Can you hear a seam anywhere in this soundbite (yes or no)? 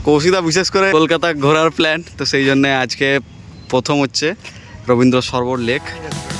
yes